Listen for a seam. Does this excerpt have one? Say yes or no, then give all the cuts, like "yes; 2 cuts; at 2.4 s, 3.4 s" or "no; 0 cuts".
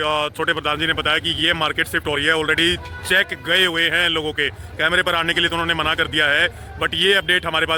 no; 0 cuts